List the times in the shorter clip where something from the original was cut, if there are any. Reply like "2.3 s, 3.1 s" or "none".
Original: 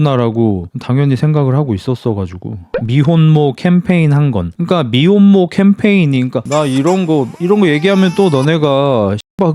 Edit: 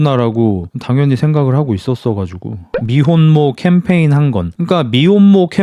none